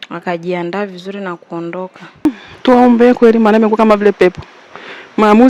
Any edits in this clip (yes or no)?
yes